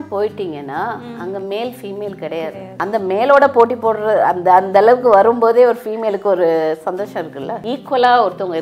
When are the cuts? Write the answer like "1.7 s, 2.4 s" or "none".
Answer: 2.7 s, 7.6 s